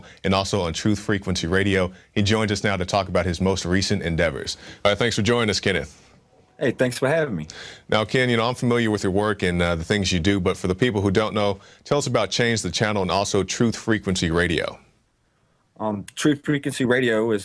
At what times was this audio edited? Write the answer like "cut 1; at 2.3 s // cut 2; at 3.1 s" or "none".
cut 1; at 1.4 s